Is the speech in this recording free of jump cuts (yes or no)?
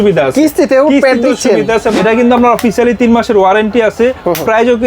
no